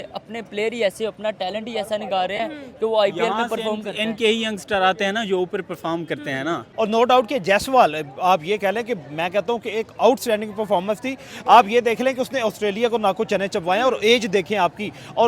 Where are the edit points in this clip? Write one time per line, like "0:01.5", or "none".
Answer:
0:06.6